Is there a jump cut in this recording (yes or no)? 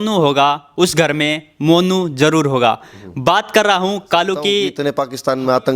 yes